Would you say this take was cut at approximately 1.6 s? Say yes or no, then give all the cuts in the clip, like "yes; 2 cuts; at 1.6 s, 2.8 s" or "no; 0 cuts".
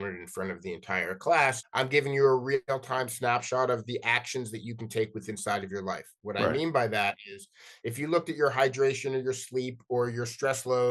yes; 1 cut; at 1.6 s